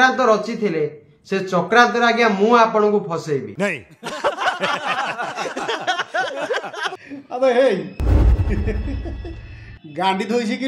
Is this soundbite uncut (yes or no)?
yes